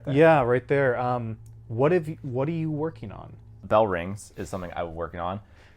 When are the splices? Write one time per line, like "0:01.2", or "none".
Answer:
0:03.6